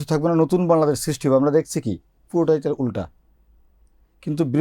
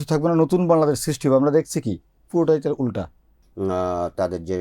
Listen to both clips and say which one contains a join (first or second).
second